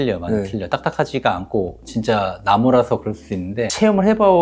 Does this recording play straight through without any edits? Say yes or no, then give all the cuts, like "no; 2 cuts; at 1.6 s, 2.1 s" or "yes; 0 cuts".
yes; 0 cuts